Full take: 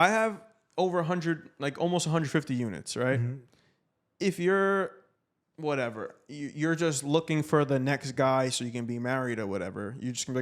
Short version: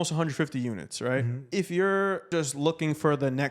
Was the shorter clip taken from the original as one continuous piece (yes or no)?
no